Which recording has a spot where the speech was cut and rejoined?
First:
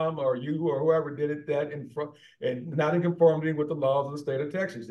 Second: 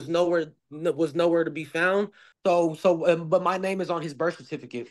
second; 1 cut; at 2.2 s

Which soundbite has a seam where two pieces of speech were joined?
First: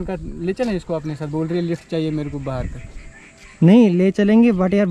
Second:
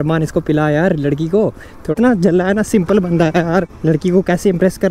second; 2 cuts; at 1.7 s, 3.7 s

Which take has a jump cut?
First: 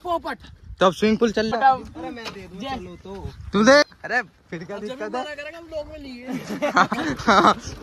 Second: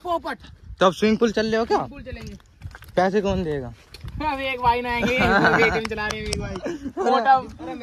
first; 2 cuts; at 1.5 s, 3.9 s

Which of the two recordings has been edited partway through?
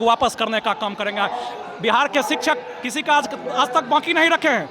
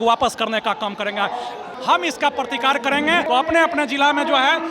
second; 2 cuts; at 1.7 s, 3.2 s

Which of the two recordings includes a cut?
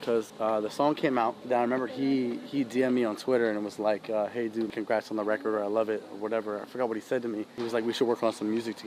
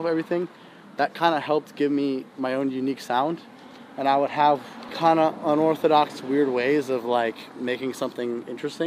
first; 3 cuts; at 1.4 s, 4.7 s, 7.5 s

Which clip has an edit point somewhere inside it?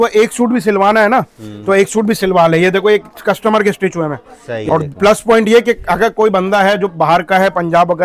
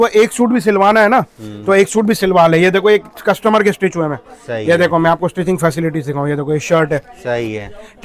first; 1 cut; at 4.6 s

